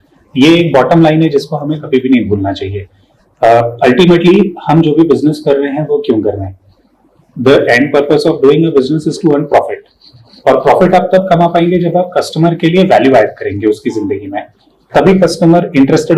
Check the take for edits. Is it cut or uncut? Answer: uncut